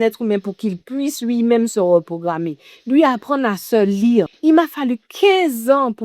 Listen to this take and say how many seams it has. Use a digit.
1